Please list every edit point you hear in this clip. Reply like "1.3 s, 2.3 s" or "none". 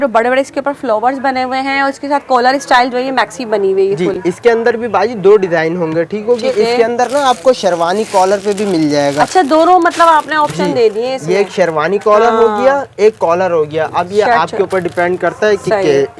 none